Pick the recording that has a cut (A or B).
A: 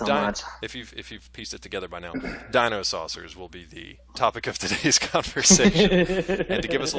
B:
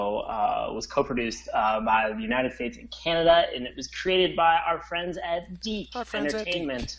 A